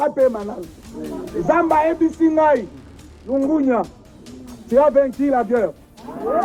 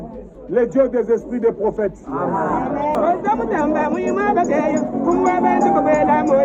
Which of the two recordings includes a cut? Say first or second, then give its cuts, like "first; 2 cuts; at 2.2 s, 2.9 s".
second; 1 cut; at 2.9 s